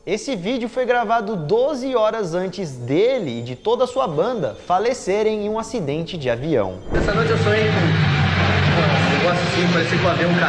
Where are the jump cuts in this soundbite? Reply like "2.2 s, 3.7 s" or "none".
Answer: none